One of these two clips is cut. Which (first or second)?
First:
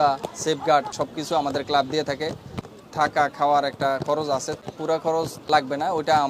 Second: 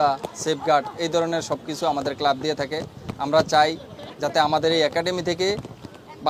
first